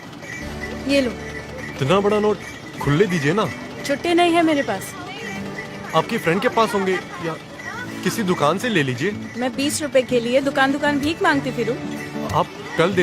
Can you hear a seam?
yes; 1 cut; at 1.7 s

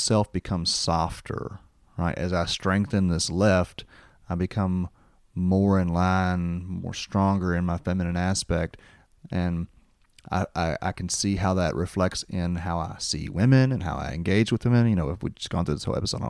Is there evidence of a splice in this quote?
no; 0 cuts

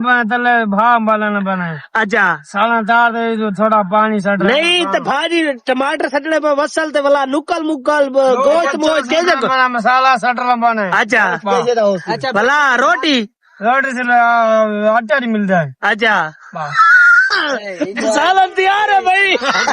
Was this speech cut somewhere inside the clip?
no; 0 cuts

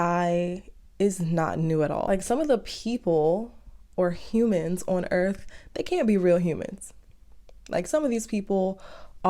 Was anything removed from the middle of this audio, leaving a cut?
yes; 1 cut; at 2.0 s

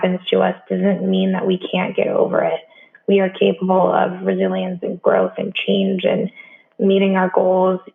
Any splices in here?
no; 0 cuts

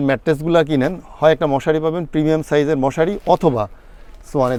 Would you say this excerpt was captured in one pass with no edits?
yes; 0 cuts

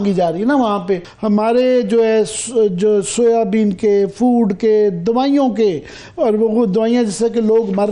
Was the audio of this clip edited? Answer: yes; 1 cut; at 1.1 s

